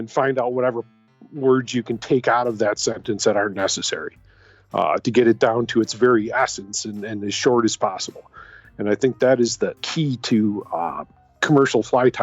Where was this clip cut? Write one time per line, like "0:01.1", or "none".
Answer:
0:09.8
0:11.1